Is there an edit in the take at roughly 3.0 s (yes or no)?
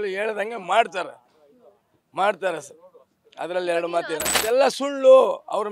no